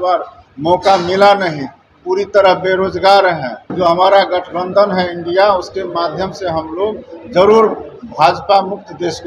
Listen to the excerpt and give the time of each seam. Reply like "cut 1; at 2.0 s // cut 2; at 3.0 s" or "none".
cut 1; at 3.6 s